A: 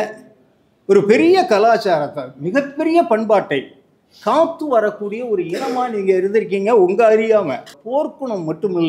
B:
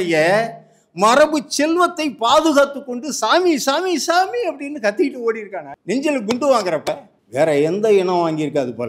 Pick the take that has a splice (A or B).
A